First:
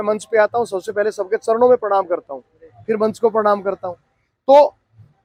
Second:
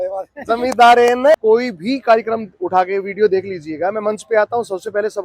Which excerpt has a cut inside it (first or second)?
second